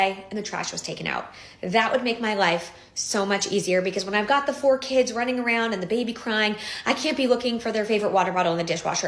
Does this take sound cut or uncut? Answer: uncut